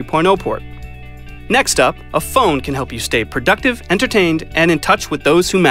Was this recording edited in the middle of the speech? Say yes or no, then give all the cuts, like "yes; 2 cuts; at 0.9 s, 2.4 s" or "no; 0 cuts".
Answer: no; 0 cuts